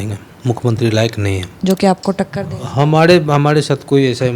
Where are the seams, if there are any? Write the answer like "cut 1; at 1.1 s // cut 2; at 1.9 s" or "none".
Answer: cut 1; at 1.5 s